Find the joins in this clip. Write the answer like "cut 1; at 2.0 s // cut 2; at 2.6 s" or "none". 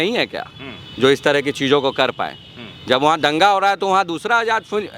none